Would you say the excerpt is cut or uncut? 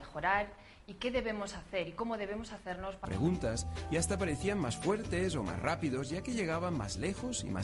uncut